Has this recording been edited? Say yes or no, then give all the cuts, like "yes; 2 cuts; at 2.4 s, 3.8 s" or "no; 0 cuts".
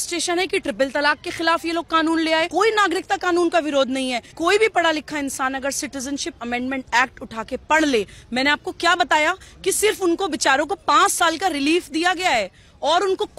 yes; 2 cuts; at 2.5 s, 4.3 s